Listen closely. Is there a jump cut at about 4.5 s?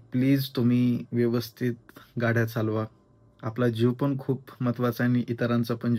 no; 0 cuts

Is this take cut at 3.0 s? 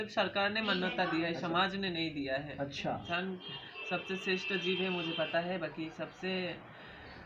yes; 1 cut; at 3.0 s

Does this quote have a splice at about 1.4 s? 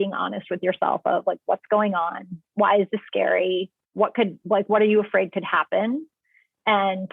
no; 0 cuts

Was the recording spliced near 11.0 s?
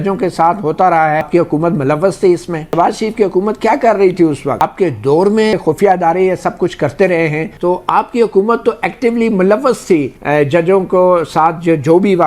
no; 5 cuts; at 1.3 s, 2.7 s, 4.6 s, 5.5 s, 7.5 s

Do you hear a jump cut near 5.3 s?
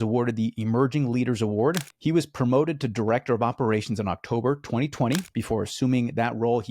yes; 2 cuts; at 1.9 s, 5.3 s

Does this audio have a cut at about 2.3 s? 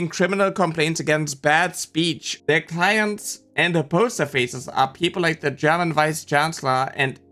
yes; 1 cut; at 2.3 s

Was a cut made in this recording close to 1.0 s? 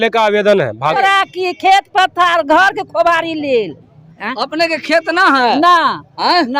yes; 1 cut; at 1.0 s

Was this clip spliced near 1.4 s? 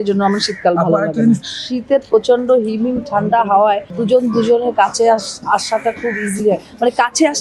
yes; 2 cuts; at 1.4 s, 4.0 s

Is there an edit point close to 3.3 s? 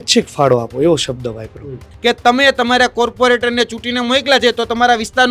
no; 1 cut; at 1.9 s

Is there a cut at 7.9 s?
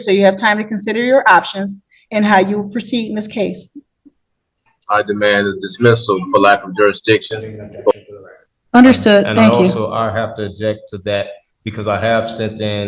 yes; 1 cut; at 7.9 s

